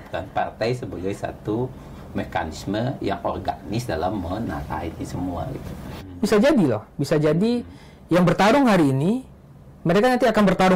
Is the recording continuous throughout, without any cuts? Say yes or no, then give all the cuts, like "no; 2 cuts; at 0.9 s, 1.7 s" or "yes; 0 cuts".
no; 1 cut; at 6.0 s